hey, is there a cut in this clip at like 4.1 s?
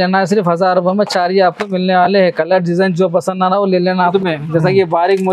yes; 1 cut; at 4.1 s

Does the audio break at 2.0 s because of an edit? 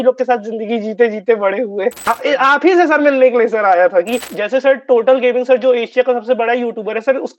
yes; 2 cuts; at 2.0 s, 4.3 s

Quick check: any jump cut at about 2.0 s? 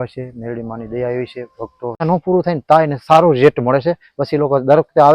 yes; 1 cut; at 2.0 s

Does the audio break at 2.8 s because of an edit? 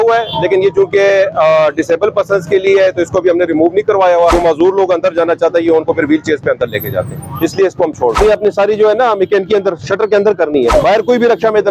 no; 3 cuts; at 4.3 s, 8.2 s, 10.7 s

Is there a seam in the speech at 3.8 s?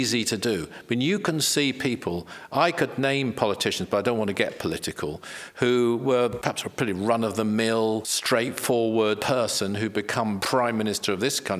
no; 4 cuts; at 6.4 s, 8.1 s, 9.2 s, 10.4 s

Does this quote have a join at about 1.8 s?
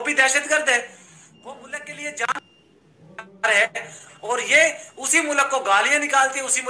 no; 0 cuts

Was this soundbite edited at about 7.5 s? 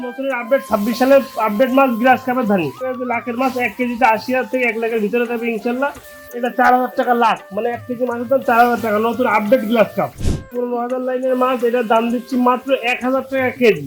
no; 3 cuts; at 2.8 s, 6.3 s, 10.5 s

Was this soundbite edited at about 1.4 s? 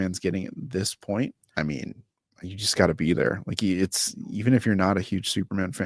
yes; 1 cut; at 1.4 s

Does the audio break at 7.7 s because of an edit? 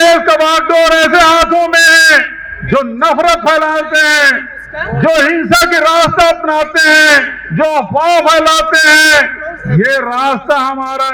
no; 0 cuts

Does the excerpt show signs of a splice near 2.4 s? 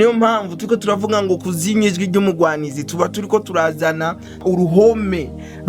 no; 1 cut; at 4.4 s

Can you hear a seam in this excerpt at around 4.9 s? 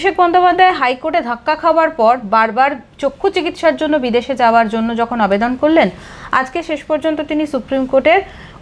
no; 0 cuts

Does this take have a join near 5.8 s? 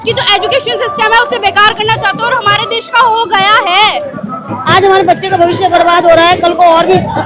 no; 1 cut; at 3.9 s

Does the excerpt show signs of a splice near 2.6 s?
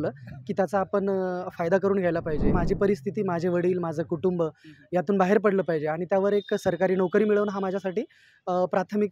yes; 1 cut; at 2.6 s

